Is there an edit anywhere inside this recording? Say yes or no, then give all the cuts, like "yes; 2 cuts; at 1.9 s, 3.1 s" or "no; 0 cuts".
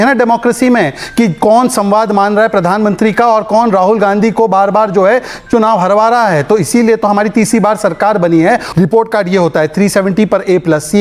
yes; 1 cut; at 8.7 s